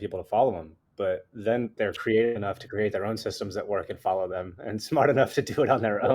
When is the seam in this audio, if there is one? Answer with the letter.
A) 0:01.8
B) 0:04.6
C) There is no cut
A